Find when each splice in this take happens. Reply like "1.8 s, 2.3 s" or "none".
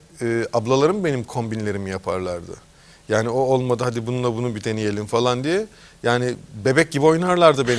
none